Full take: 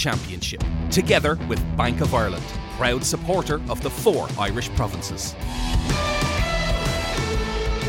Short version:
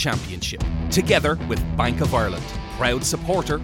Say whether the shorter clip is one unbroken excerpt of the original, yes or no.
yes